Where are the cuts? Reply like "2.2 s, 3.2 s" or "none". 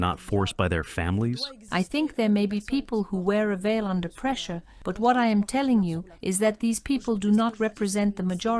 1.5 s